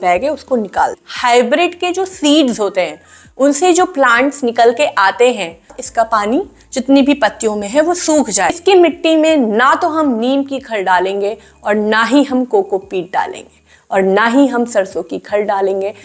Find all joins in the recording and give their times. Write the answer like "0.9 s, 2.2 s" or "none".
1.1 s, 5.8 s, 8.6 s